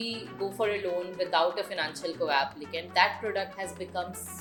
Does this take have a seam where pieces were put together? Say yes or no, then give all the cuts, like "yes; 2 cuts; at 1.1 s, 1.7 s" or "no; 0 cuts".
no; 0 cuts